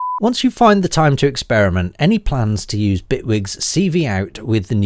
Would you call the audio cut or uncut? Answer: uncut